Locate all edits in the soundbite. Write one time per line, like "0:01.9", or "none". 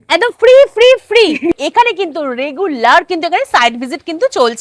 0:01.5